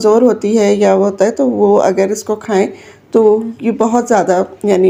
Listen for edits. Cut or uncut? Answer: uncut